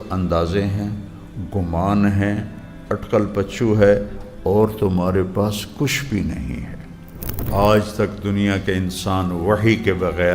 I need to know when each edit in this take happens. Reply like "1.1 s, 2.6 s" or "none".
7.5 s